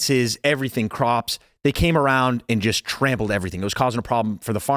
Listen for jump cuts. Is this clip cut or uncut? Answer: uncut